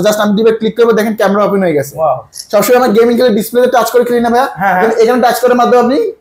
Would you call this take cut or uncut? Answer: uncut